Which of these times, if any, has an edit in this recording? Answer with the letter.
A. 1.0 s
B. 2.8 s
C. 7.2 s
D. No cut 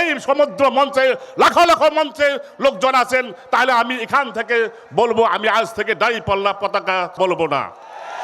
C